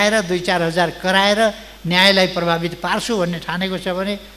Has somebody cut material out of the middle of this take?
no; 0 cuts

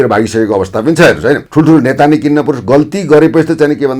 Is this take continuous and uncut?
no; 1 cut; at 1.5 s

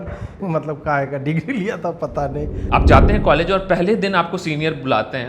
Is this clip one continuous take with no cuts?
no; 1 cut; at 2.6 s

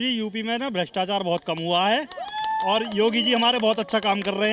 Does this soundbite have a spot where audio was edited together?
no; 0 cuts

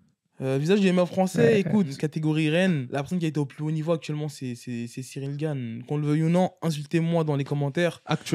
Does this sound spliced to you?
yes; 2 cuts; at 2.0 s, 2.9 s

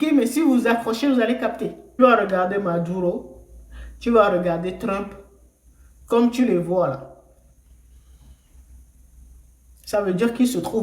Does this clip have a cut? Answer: yes; 1 cut; at 2.0 s

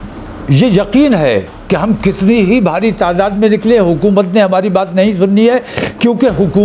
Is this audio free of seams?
yes; 0 cuts

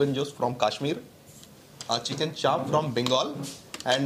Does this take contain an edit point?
no; 0 cuts

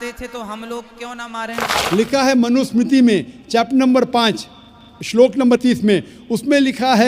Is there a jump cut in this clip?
yes; 1 cut; at 1.8 s

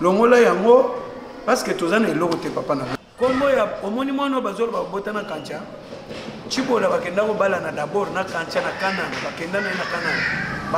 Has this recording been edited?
yes; 1 cut; at 2.9 s

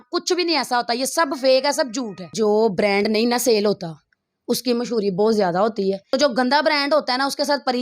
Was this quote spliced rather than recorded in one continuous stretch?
yes; 2 cuts; at 2.3 s, 6.0 s

